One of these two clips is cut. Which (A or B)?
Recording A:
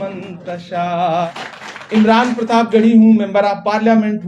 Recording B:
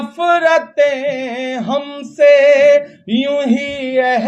A